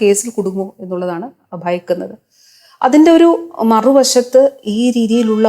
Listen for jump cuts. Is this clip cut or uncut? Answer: uncut